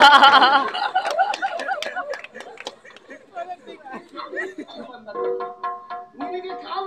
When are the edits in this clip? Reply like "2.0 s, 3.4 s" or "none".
4.9 s